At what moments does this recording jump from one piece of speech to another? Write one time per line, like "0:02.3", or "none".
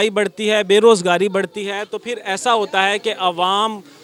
none